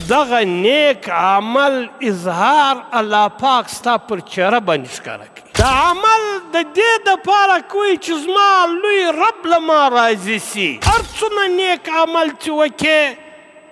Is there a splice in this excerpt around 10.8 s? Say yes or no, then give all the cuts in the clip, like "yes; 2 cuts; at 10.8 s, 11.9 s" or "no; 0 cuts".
yes; 2 cuts; at 5.6 s, 10.8 s